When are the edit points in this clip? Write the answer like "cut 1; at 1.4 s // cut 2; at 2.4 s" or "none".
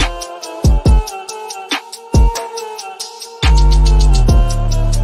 none